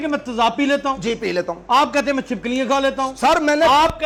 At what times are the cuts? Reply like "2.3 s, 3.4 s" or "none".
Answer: none